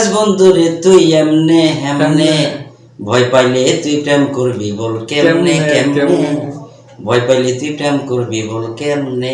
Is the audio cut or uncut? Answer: uncut